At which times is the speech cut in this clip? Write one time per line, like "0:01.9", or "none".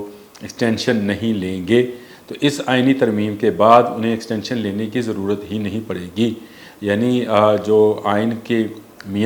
none

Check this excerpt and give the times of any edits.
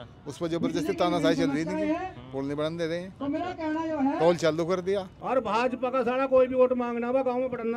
0:05.2

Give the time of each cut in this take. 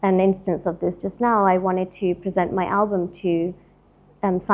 none

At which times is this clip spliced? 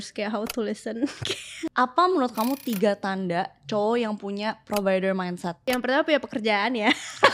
0:01.7
0:05.6

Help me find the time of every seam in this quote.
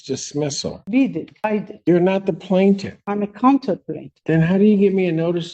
none

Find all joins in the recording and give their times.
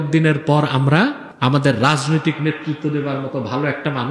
0:01.3

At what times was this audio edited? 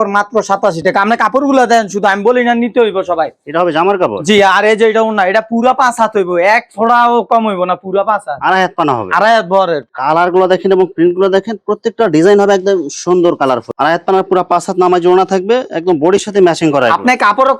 0:09.9
0:13.7

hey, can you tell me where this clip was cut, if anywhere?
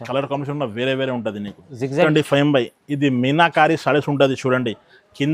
0:02.0

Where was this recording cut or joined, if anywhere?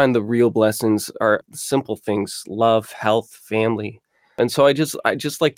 0:01.5
0:04.4

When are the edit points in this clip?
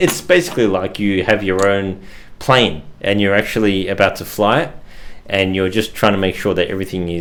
none

